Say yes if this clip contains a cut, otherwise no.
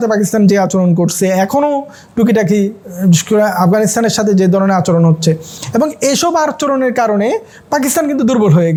no